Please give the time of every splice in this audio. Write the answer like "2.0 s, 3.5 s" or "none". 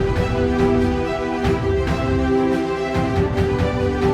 none